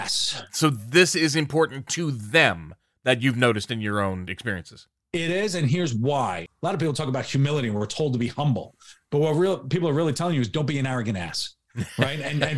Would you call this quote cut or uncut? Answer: cut